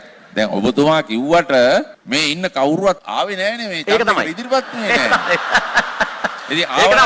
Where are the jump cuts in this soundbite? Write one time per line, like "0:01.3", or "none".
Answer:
0:02.0
0:03.1